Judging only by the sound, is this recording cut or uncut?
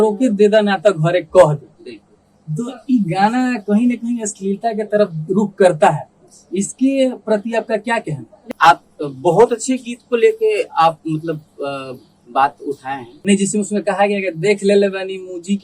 cut